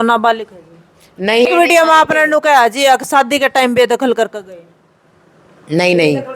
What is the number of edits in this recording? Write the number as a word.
one